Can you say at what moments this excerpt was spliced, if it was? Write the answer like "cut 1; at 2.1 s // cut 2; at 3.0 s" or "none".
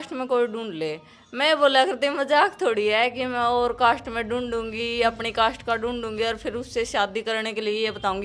none